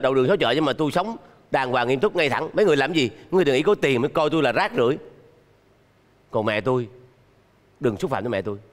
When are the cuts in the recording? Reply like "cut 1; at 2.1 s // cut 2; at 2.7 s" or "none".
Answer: none